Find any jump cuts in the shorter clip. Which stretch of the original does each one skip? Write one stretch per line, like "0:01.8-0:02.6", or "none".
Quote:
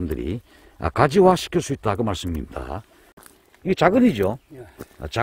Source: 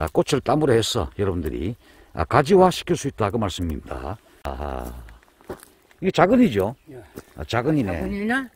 0:04.3-0:05.3